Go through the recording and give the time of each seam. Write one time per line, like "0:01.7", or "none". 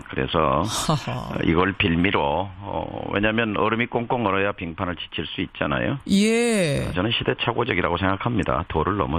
none